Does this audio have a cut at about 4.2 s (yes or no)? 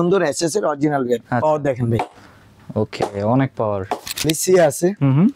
yes